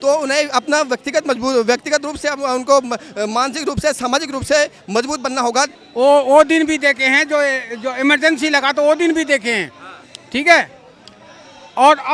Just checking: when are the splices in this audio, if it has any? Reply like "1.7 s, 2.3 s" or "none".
5.8 s